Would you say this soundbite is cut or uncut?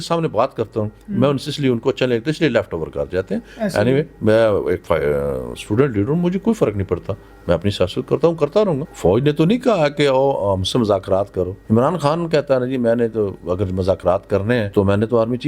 cut